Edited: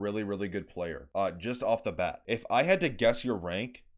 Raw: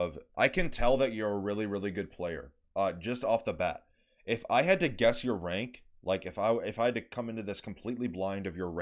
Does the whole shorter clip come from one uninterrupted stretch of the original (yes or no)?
no